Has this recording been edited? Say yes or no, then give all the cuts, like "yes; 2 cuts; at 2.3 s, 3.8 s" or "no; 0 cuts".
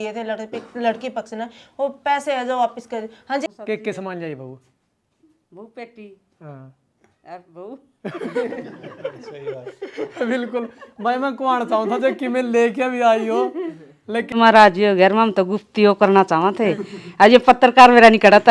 yes; 2 cuts; at 3.5 s, 14.3 s